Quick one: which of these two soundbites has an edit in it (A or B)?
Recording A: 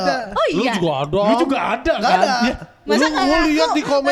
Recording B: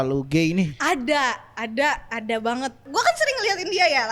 B